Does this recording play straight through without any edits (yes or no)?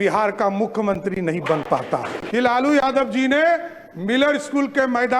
no